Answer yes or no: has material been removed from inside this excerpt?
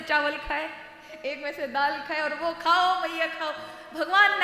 no